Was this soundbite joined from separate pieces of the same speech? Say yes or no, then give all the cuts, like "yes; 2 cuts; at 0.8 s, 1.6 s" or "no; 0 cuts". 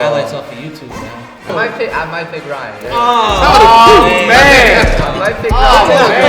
yes; 1 cut; at 1.5 s